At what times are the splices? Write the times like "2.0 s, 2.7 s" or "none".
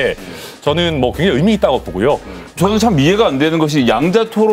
2.5 s